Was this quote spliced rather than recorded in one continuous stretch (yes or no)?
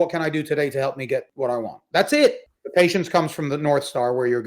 yes